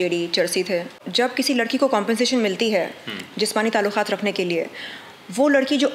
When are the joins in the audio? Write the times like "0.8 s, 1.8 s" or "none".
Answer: 1.0 s